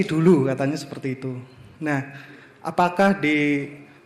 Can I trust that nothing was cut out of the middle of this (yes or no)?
yes